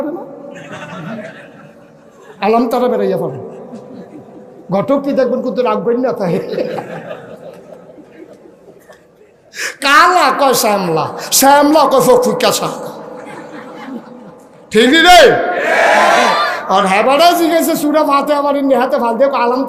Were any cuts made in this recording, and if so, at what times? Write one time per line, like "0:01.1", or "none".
none